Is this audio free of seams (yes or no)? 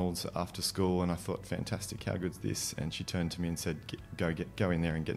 yes